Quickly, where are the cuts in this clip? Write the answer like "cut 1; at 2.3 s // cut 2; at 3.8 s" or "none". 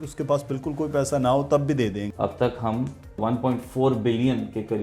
cut 1; at 2.0 s // cut 2; at 3.2 s